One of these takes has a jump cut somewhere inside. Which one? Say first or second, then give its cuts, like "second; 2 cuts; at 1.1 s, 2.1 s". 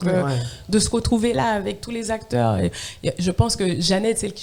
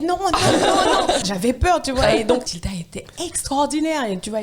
second; 2 cuts; at 1.3 s, 2.6 s